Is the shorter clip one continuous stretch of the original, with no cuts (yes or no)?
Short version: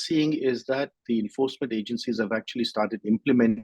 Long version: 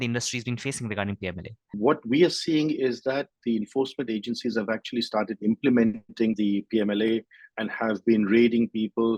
yes